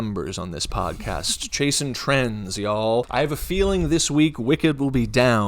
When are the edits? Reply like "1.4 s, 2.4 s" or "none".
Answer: 3.1 s

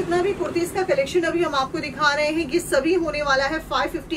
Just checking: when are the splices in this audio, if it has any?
none

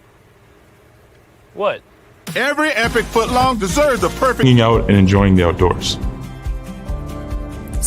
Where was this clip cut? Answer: 4.4 s

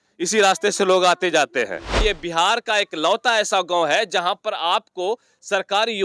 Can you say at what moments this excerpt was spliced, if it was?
2.0 s

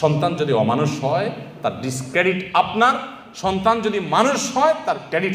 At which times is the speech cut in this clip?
none

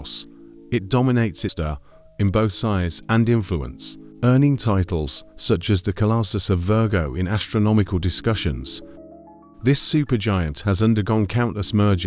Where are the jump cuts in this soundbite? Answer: 1.5 s

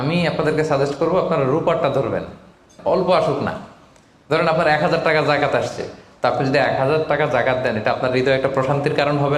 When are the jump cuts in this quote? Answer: 2.7 s

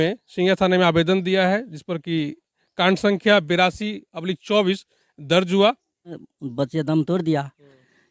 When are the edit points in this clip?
6.4 s

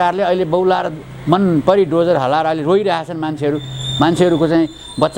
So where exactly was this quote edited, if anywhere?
none

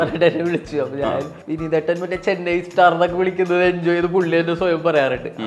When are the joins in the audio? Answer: 1.4 s

